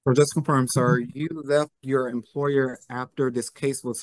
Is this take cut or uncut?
uncut